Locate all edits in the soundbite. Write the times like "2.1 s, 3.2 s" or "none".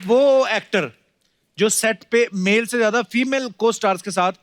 none

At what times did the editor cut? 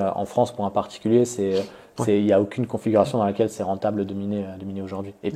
none

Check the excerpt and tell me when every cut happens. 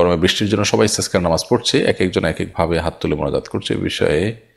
none

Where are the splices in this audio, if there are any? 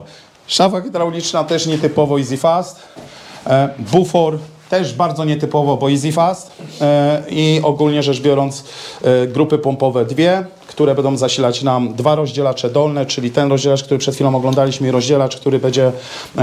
none

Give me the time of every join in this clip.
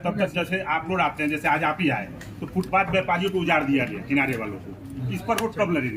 none

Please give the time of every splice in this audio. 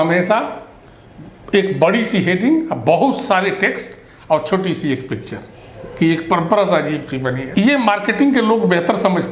7.4 s

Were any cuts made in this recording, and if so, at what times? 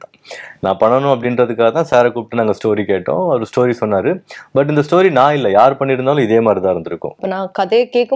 7.2 s

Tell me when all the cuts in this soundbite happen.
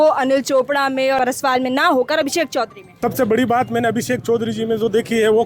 1.2 s, 2.8 s

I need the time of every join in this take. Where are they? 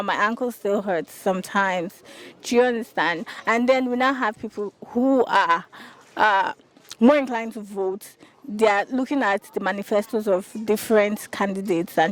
none

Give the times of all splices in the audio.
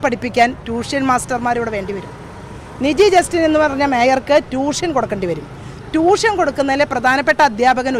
none

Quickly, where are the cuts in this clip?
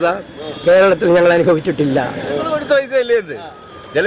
2.5 s

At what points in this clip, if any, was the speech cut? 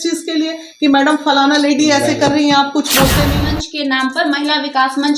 3.2 s

